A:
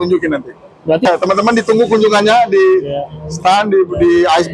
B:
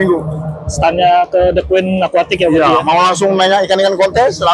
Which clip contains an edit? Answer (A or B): A